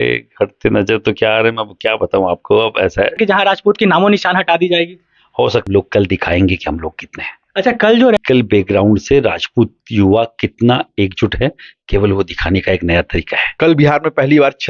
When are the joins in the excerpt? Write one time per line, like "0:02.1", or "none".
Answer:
0:03.2
0:05.7
0:08.2
0:13.4